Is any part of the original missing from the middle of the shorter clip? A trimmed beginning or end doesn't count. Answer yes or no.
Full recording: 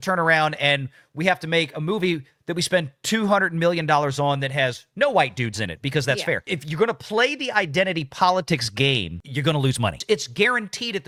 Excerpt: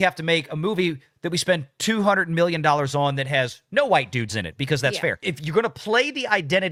no